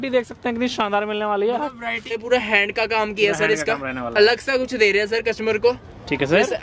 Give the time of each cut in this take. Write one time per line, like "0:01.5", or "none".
0:02.2